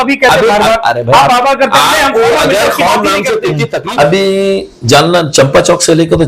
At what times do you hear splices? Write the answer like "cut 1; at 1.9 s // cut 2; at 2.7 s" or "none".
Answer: cut 1; at 3.7 s